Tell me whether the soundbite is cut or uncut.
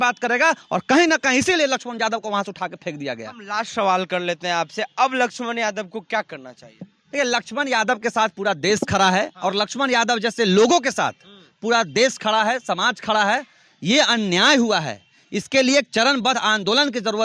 uncut